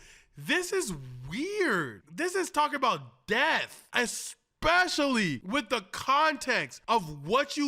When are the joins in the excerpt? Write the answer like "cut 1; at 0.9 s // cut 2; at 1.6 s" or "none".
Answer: cut 1; at 2.0 s